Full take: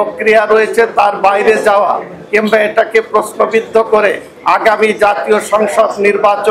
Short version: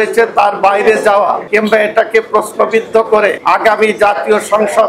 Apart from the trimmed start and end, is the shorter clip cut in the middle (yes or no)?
yes